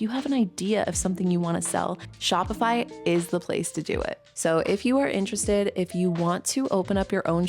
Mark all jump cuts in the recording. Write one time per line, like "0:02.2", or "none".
0:04.2